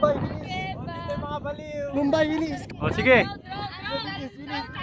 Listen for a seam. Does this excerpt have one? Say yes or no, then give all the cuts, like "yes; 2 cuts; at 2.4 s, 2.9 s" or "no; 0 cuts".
yes; 1 cut; at 2.6 s